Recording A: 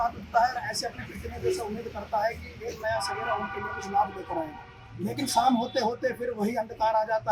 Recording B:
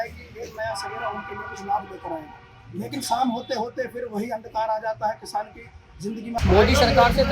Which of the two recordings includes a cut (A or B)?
B